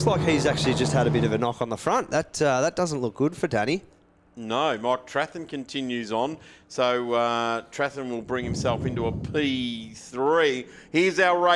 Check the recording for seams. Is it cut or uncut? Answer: uncut